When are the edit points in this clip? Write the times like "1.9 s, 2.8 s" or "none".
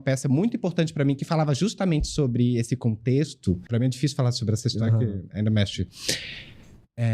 3.6 s